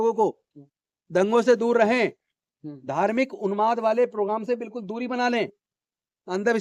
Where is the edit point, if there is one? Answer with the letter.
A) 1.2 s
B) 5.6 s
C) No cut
C